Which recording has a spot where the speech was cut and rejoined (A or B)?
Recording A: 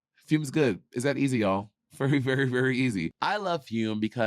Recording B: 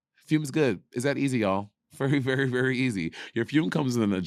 A